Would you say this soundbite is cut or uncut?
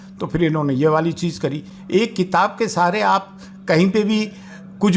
uncut